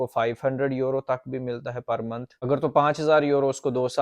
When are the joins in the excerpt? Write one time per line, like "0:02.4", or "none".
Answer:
0:02.3